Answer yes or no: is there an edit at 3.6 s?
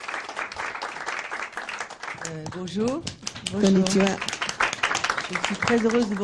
no